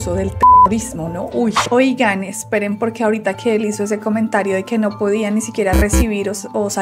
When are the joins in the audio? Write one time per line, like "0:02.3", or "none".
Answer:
0:01.6